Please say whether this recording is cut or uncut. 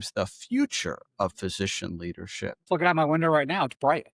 cut